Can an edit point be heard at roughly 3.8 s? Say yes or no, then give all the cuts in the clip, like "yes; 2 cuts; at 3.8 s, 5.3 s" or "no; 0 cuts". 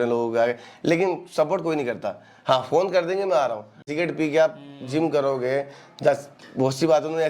yes; 1 cut; at 3.8 s